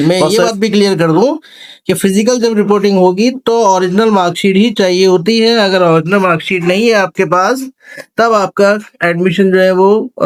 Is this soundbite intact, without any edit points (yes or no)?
yes